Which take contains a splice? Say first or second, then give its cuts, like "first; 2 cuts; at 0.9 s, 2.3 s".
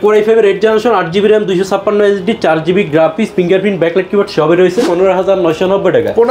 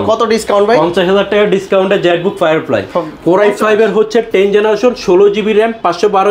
first; 1 cut; at 4.8 s